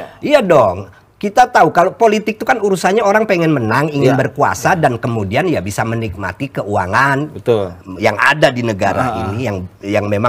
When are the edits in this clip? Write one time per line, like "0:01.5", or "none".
none